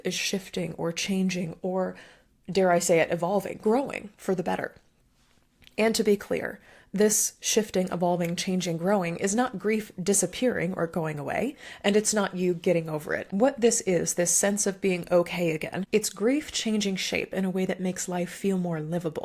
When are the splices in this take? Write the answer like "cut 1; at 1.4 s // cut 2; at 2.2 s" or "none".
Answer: cut 1; at 13.1 s // cut 2; at 15.8 s